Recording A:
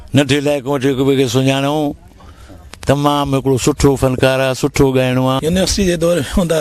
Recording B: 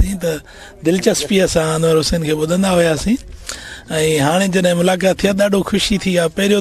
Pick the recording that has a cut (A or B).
A